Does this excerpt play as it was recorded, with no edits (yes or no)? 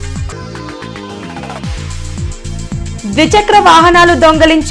no